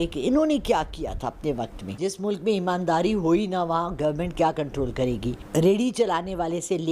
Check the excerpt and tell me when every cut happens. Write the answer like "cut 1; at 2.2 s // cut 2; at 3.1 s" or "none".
cut 1; at 1.8 s // cut 2; at 5.4 s